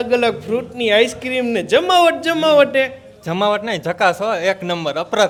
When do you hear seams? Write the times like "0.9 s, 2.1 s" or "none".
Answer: none